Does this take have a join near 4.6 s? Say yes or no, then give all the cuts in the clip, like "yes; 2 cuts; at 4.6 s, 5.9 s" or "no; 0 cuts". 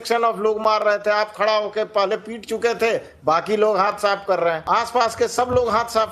yes; 1 cut; at 4.6 s